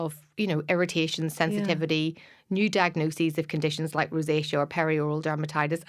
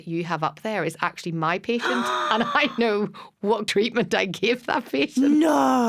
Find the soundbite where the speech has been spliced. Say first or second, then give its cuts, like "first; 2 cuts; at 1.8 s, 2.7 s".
second; 1 cut; at 3.7 s